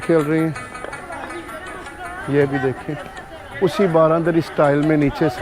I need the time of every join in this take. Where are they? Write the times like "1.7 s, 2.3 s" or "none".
1.0 s